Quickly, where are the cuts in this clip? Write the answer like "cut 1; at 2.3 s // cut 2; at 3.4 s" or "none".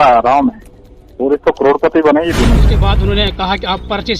cut 1; at 2.7 s